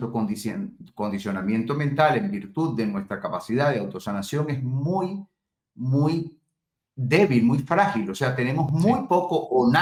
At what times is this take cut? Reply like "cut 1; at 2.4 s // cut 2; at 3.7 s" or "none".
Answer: none